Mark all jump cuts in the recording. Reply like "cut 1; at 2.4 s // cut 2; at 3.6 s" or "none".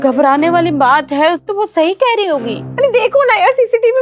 cut 1; at 1.4 s // cut 2; at 2.6 s